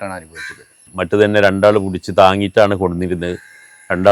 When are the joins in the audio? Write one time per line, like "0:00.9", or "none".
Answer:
0:01.0